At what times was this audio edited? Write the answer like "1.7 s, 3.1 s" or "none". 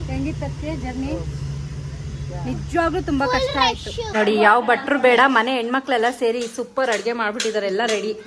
4.0 s